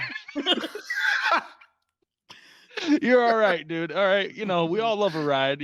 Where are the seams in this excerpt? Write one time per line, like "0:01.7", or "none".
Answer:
none